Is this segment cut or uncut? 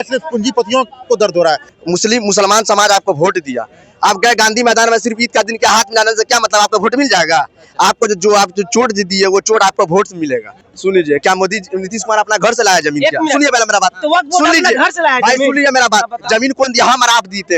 cut